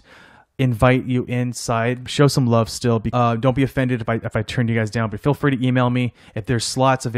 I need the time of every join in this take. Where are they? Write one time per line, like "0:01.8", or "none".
0:02.1
0:03.1